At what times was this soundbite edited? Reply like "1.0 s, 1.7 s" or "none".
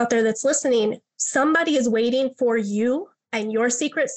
3.2 s

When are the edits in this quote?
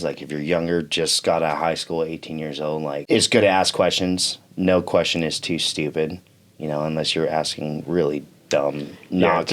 3.0 s

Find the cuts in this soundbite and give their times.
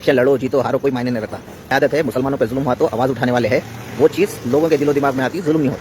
1.8 s

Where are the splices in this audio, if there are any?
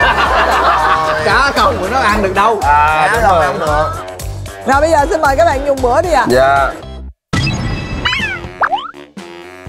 none

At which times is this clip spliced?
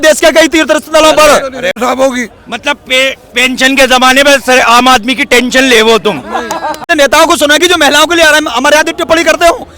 1.8 s, 6.8 s

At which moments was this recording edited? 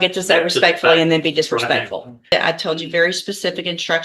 2.3 s

